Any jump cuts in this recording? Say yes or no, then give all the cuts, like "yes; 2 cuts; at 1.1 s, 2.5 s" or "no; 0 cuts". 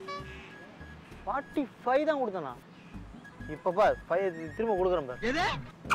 no; 0 cuts